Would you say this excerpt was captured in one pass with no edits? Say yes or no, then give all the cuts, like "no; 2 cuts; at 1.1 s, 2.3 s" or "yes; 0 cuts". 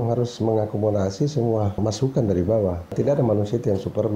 no; 2 cuts; at 1.8 s, 2.9 s